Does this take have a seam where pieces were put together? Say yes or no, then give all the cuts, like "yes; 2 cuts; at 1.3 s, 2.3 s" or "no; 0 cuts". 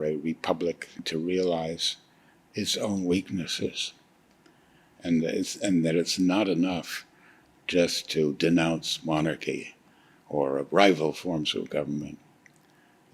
yes; 1 cut; at 1.1 s